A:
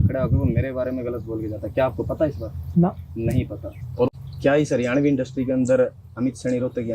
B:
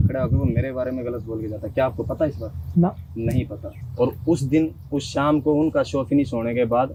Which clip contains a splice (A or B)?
A